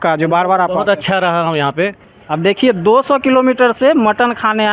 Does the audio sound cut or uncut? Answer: cut